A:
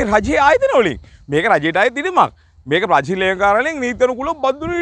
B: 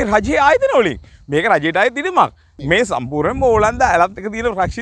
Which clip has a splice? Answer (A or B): B